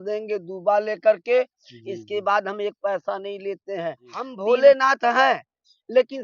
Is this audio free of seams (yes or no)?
no